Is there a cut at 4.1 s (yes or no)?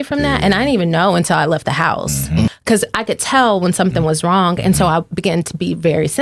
no